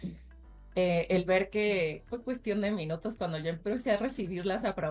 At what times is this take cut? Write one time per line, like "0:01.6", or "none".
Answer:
0:02.1